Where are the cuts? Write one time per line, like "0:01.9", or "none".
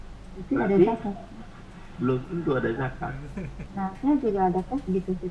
0:03.5